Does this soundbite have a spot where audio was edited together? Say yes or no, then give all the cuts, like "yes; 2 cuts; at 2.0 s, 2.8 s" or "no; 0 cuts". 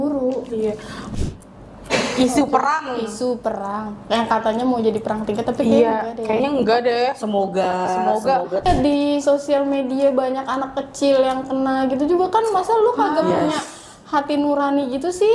yes; 2 cuts; at 1.0 s, 8.6 s